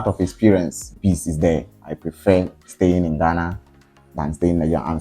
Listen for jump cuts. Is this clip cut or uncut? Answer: cut